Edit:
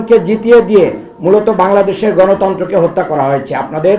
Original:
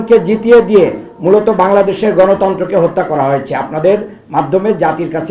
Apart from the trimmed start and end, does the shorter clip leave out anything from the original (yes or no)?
no